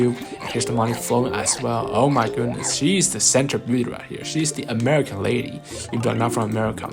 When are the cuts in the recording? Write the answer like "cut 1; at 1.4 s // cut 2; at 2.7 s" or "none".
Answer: none

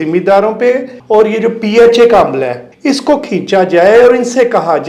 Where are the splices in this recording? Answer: cut 1; at 0.9 s // cut 2; at 2.7 s

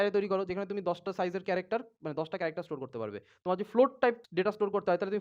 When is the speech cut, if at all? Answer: cut 1; at 4.2 s

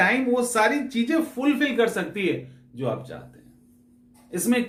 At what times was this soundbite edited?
none

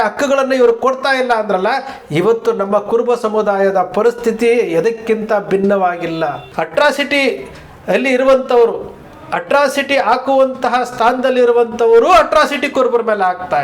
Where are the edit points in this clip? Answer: cut 1; at 6.5 s

